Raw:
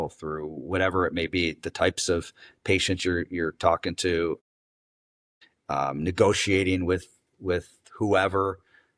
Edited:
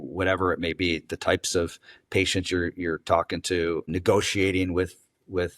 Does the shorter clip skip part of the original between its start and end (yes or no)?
yes